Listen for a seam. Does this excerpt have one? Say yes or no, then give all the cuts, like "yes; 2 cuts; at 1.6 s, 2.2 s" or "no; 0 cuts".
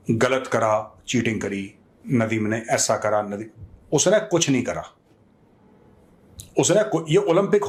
no; 0 cuts